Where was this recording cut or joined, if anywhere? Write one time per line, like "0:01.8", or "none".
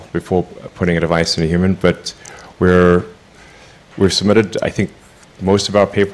0:01.6